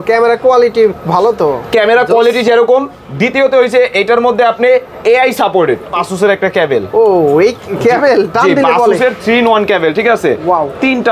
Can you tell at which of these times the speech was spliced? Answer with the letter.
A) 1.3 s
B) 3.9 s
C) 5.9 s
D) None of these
C